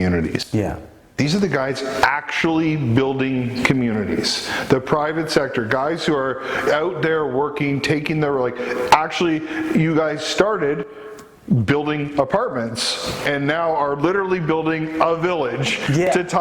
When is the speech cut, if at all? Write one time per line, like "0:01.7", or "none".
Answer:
none

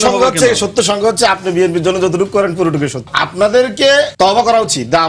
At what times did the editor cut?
0:03.1
0:04.1

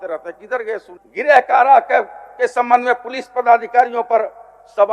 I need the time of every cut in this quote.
0:01.0

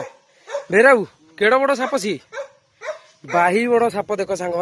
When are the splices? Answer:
none

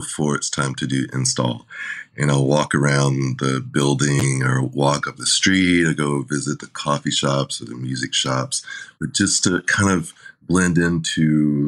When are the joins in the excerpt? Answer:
none

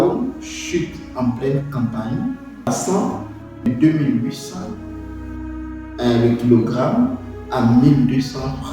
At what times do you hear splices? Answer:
0:02.7
0:03.7

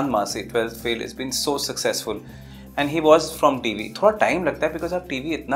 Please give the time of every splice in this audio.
none

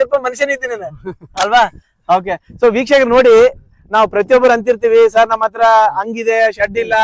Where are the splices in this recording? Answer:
none

